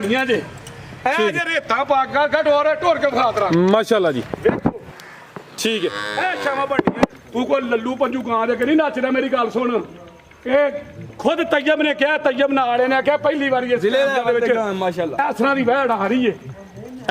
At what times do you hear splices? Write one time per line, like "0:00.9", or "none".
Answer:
0:07.1